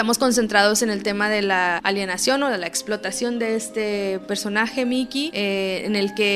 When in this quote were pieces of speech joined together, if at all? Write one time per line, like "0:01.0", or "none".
0:01.8
0:05.3